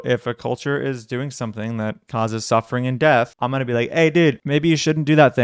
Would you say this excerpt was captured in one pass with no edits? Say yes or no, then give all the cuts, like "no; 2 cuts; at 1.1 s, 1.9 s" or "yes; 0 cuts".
no; 2 cuts; at 2.0 s, 3.4 s